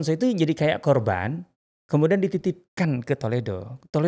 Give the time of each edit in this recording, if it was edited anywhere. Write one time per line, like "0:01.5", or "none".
none